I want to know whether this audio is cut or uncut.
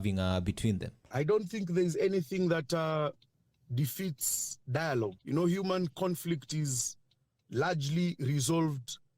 cut